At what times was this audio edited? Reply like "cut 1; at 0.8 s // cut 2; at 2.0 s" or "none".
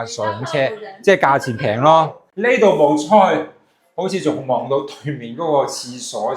cut 1; at 2.2 s